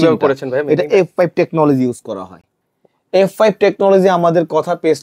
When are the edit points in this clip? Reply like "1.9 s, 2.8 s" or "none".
none